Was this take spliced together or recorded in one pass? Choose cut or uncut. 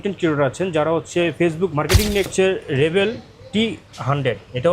cut